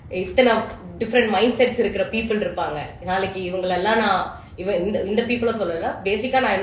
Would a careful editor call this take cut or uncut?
uncut